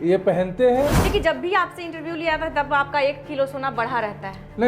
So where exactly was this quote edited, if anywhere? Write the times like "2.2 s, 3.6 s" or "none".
1.0 s

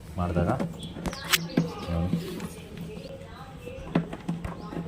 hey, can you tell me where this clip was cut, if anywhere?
3.1 s

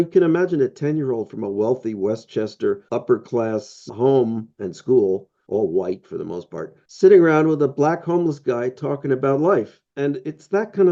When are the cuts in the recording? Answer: none

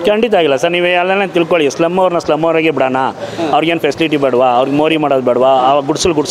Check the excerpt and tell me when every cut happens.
none

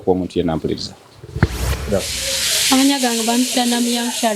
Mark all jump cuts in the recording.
1.9 s

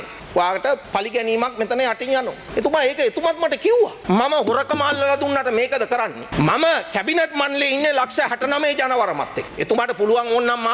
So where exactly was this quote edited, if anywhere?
4.0 s

